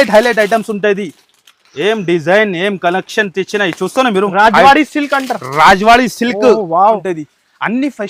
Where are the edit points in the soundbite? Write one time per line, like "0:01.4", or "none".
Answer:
0:06.8